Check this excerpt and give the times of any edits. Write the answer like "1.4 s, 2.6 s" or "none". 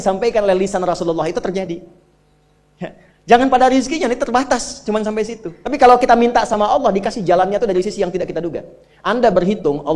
none